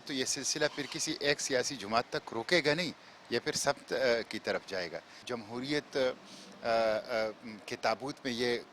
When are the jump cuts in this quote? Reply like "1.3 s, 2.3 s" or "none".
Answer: 5.2 s